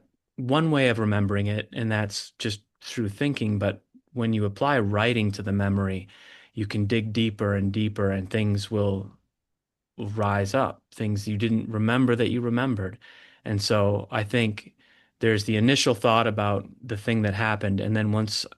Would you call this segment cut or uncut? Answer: uncut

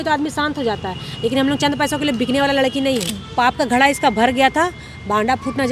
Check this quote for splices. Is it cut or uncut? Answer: cut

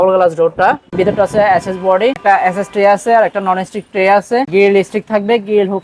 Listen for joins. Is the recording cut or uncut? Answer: cut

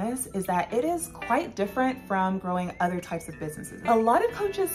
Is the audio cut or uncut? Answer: cut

